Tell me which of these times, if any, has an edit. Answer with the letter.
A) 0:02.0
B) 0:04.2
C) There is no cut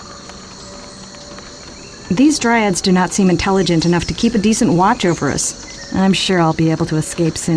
A